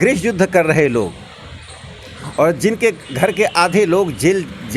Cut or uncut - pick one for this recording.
uncut